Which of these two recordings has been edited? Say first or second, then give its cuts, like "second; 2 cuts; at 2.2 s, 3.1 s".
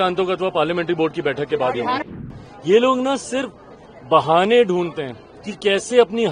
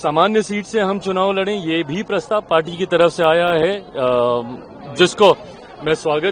first; 1 cut; at 2.1 s